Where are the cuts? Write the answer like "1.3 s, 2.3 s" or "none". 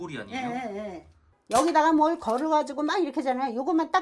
none